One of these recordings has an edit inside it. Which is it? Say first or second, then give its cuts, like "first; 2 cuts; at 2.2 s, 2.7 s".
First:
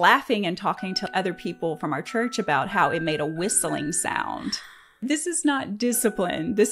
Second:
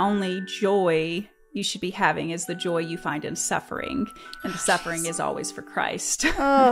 first; 2 cuts; at 1.1 s, 5.0 s